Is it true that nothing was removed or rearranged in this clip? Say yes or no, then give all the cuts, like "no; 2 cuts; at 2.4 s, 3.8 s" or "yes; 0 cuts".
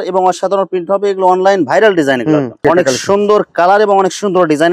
no; 1 cut; at 2.6 s